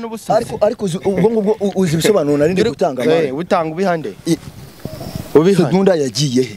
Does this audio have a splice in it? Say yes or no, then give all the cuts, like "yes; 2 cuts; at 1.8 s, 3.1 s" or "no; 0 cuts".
no; 0 cuts